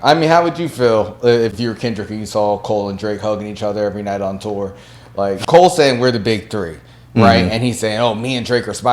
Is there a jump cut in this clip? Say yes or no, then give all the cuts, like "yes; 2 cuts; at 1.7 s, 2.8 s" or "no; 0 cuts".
yes; 2 cuts; at 1.5 s, 5.4 s